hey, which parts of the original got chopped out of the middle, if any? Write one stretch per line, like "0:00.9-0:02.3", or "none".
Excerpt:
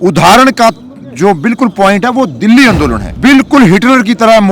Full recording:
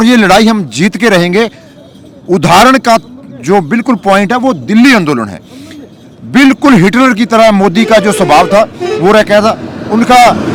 0:05.3-0:06.2

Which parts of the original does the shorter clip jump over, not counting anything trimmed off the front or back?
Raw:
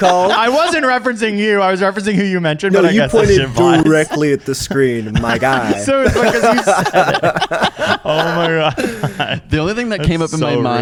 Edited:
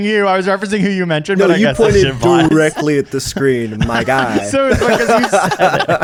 none

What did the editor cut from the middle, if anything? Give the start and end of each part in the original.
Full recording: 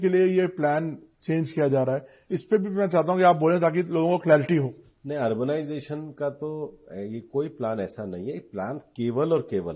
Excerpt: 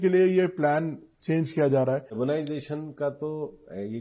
0:02.2-0:05.4

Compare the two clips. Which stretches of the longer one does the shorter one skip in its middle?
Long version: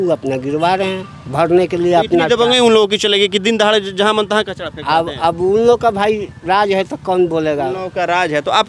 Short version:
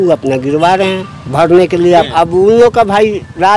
0:02.1-0:05.1

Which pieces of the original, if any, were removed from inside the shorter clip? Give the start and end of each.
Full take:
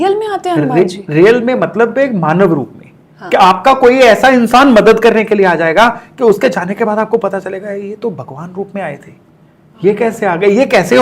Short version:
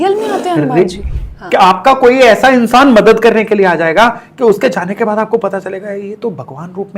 0:01.0-0:02.8

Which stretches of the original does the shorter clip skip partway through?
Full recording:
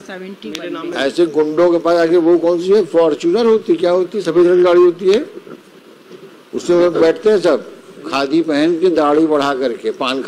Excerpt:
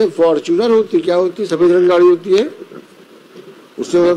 none

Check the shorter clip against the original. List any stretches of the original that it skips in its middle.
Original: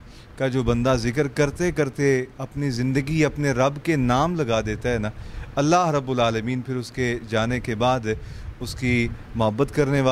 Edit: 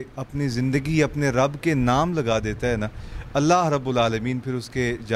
none

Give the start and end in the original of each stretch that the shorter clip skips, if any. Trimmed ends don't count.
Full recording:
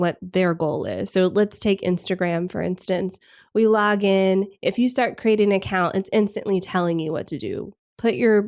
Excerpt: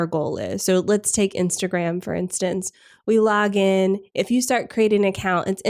none

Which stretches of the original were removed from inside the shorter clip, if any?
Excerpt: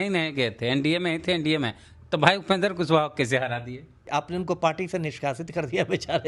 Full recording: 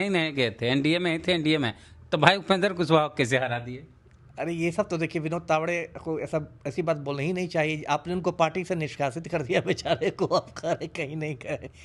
0:04.0-0:07.8

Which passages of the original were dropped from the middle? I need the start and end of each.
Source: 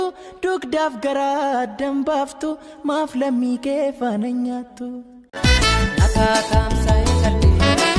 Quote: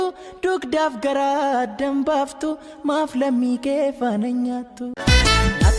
0:04.8-0:05.2

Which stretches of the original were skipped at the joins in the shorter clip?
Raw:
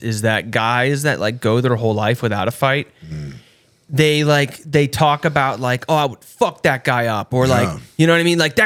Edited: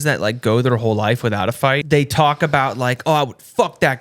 0:02.8-0:04.7

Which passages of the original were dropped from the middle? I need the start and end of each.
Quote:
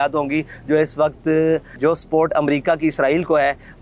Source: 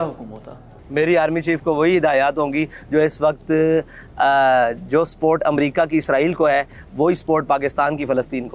0:03.9-0:04.8

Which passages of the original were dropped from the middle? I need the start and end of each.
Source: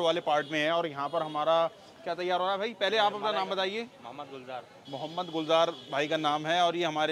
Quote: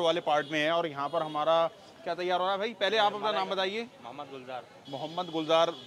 none

